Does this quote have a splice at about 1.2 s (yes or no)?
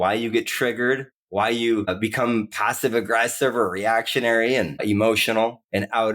yes